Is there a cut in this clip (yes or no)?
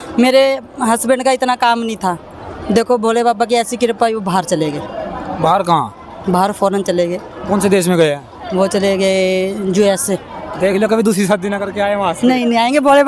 no